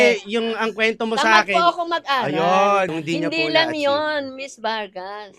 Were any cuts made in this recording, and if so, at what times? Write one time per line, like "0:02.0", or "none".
0:02.9